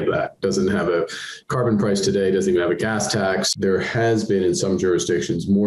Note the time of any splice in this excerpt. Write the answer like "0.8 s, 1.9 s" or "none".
3.5 s